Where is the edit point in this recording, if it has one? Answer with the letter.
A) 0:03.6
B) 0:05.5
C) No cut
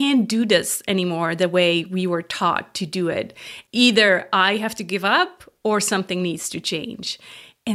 A